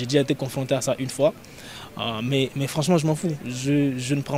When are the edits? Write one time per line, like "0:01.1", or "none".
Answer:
none